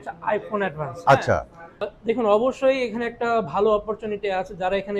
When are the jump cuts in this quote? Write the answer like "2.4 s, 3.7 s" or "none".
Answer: 1.8 s